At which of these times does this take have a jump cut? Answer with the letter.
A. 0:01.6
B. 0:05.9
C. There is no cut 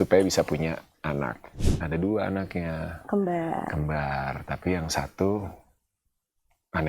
A